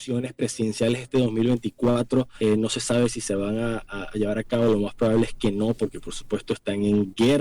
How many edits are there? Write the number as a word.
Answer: one